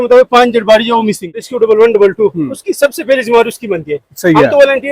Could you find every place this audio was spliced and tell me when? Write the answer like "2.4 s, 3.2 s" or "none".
1.5 s